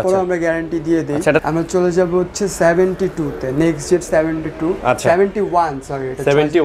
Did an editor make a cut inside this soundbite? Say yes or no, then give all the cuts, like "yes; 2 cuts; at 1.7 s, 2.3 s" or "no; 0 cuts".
yes; 1 cut; at 1.4 s